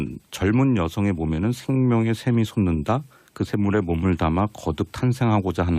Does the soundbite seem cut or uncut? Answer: uncut